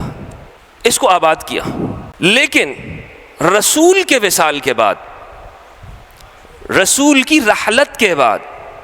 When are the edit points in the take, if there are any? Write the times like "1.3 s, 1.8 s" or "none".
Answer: 2.0 s